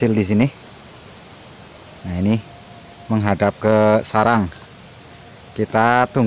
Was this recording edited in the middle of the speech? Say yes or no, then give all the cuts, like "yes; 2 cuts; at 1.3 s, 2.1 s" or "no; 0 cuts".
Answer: no; 0 cuts